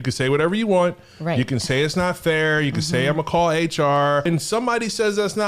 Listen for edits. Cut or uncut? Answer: cut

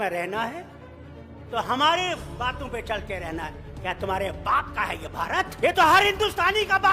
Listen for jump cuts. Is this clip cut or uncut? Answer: cut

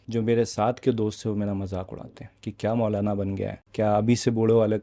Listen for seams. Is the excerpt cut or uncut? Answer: cut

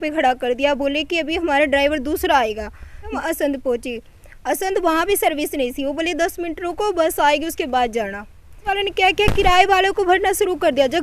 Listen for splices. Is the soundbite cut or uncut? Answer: cut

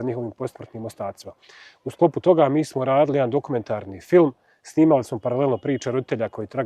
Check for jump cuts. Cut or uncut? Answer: uncut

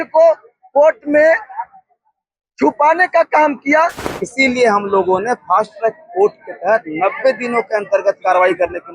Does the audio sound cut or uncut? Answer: cut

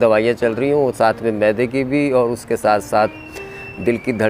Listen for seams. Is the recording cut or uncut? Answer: uncut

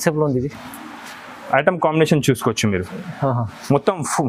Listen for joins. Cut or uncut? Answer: uncut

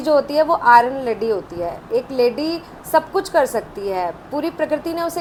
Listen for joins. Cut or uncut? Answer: uncut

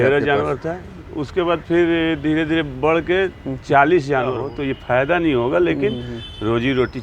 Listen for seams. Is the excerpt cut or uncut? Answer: cut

